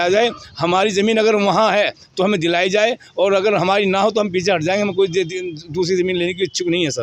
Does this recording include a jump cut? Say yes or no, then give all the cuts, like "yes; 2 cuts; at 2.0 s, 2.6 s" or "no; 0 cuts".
no; 0 cuts